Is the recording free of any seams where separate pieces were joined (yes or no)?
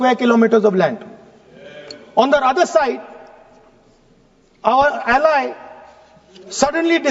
yes